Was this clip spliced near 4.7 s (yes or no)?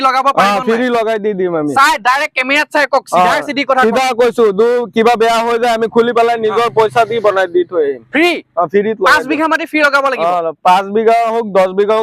no